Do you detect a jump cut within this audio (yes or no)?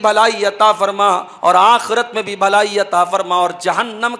no